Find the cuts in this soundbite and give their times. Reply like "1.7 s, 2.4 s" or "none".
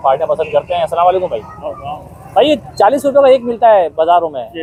none